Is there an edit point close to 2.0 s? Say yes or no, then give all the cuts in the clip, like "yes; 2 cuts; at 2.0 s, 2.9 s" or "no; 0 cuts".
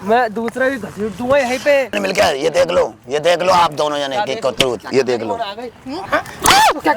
yes; 2 cuts; at 2.0 s, 6.0 s